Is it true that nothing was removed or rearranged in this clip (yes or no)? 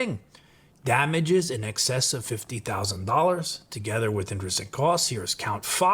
yes